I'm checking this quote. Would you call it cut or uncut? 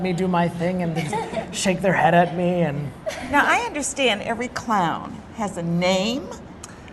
cut